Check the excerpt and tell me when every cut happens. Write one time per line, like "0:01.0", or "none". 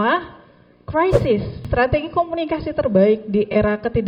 0:01.6